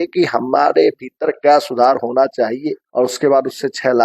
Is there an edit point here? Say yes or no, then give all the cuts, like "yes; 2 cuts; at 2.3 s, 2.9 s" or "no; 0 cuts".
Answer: yes; 1 cut; at 2.8 s